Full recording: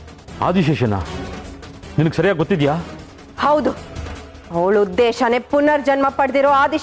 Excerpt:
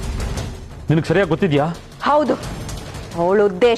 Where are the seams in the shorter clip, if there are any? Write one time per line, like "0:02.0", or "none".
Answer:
0:01.9